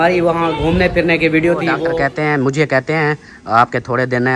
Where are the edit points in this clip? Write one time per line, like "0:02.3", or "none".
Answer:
0:01.9